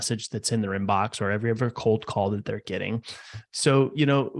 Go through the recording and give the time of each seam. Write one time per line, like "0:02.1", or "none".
0:03.4